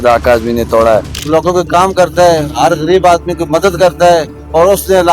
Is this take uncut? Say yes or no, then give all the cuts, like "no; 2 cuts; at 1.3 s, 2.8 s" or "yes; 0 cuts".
no; 1 cut; at 1.1 s